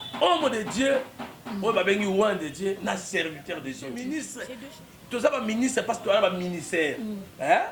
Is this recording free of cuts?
no; 1 cut; at 3.8 s

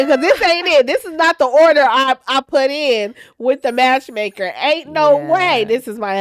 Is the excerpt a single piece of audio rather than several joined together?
yes; 0 cuts

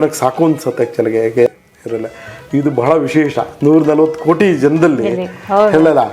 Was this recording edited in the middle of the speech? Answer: yes; 1 cut; at 1.5 s

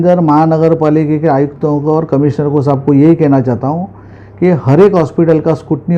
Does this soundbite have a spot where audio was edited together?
no; 0 cuts

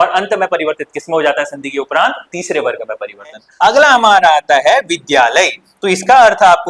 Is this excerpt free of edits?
no; 1 cut; at 3.4 s

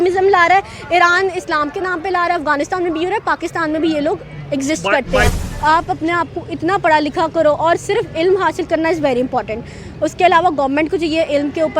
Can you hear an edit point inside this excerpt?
yes; 1 cut; at 5.3 s

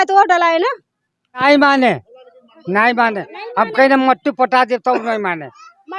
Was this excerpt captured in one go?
no; 1 cut; at 1.4 s

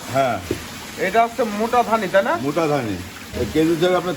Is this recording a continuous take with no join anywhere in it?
no; 1 cut; at 3.2 s

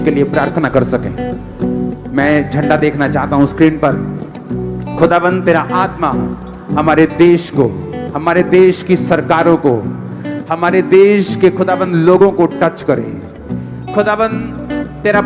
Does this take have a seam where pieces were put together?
no; 0 cuts

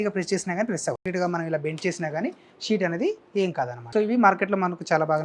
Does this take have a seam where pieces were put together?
yes; 2 cuts; at 1.0 s, 3.8 s

